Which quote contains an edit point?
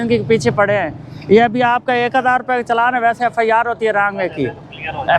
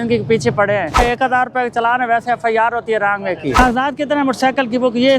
second; 2 cuts; at 0.9 s, 3.6 s

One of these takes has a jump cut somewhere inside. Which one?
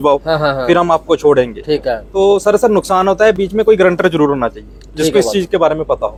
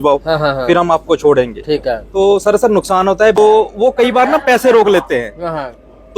second; 1 cut; at 3.4 s

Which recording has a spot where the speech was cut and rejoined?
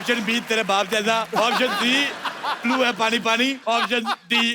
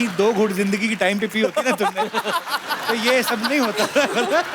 first; 2 cuts; at 1.4 s, 3.6 s

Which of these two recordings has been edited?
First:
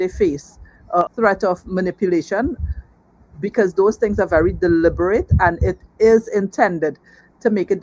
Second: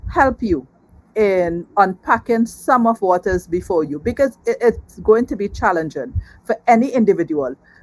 first; 1 cut; at 1.1 s

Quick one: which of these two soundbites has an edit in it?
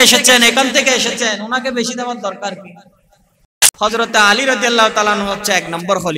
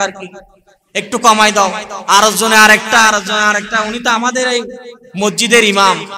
first; 1 cut; at 3.6 s

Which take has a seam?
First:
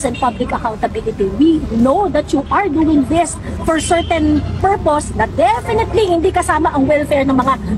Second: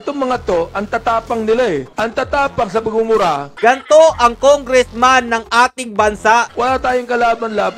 second; 2 cuts; at 3.5 s, 6.5 s

